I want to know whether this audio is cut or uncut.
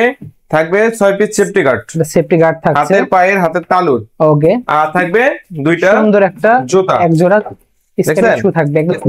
uncut